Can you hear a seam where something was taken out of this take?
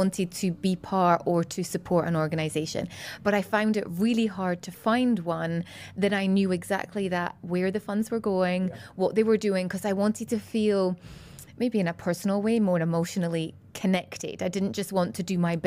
no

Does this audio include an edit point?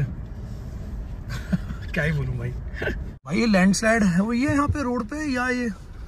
yes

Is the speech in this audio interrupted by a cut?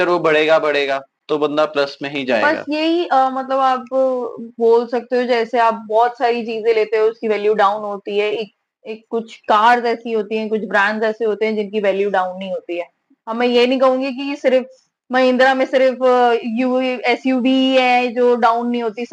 no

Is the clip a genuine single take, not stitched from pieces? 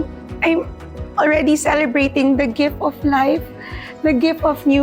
yes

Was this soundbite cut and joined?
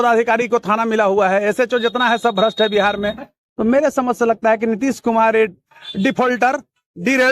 yes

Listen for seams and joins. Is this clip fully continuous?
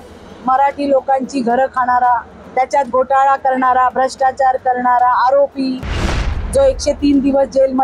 no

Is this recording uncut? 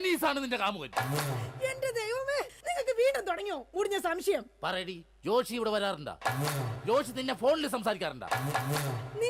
yes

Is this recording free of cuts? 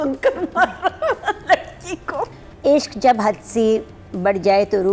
no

